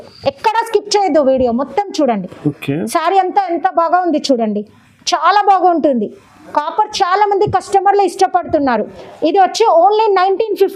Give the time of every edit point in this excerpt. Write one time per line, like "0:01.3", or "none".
none